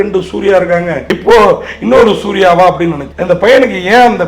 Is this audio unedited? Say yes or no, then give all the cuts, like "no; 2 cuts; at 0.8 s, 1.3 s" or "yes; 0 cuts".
no; 2 cuts; at 1.1 s, 3.1 s